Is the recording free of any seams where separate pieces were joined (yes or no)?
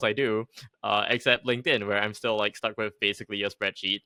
yes